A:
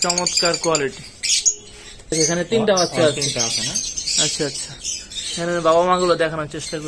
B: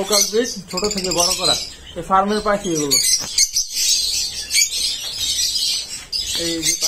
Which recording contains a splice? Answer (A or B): A